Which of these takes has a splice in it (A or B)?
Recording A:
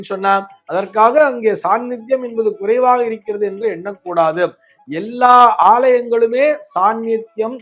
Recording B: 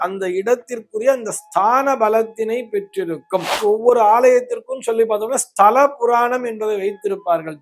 B